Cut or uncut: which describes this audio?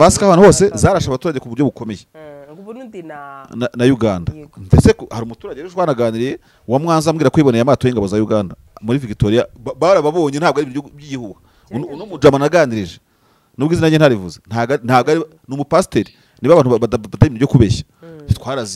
uncut